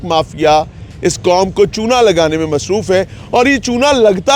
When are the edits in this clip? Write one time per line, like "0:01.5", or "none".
none